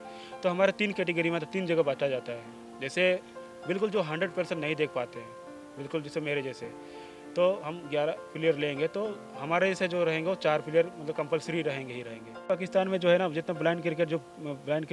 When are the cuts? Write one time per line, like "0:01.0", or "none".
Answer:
0:12.5

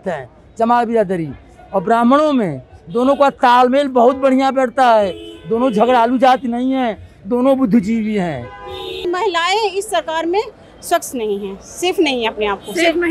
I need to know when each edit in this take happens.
0:09.1

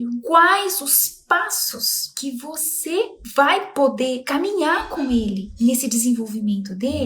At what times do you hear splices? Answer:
0:03.2

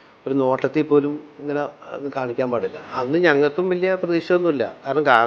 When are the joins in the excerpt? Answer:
0:02.8

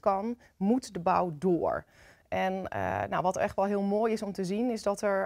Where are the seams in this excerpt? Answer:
none

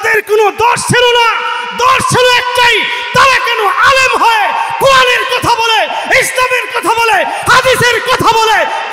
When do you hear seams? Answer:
none

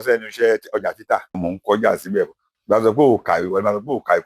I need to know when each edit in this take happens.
0:01.4
0:02.5

